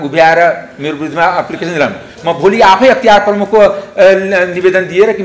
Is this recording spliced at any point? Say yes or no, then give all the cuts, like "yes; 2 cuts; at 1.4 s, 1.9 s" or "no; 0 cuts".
no; 0 cuts